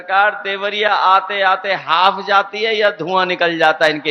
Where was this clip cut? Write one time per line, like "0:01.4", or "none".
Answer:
none